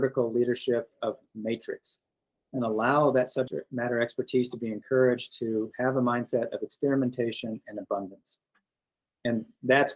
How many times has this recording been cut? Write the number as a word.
one